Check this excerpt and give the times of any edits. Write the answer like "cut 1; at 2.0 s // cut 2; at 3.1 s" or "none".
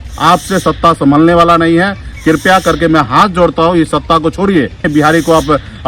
cut 1; at 4.9 s